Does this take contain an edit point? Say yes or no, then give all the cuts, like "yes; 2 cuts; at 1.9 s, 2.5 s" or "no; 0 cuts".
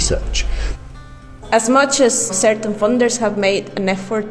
yes; 1 cut; at 1.1 s